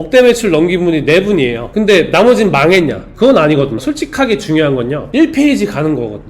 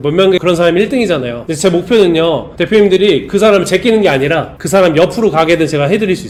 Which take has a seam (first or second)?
first